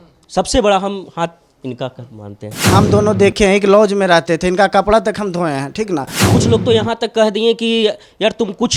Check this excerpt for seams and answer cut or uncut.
cut